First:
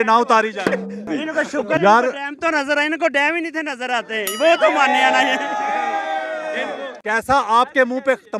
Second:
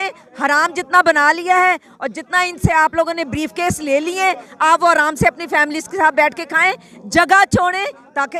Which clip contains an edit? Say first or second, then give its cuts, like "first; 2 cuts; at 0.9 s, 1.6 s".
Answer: first; 2 cuts; at 1.1 s, 7.0 s